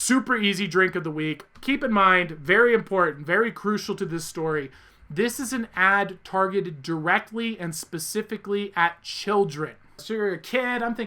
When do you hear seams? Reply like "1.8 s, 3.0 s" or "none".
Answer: 10.0 s